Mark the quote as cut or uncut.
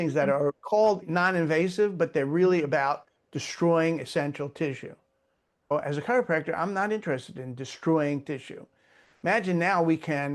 cut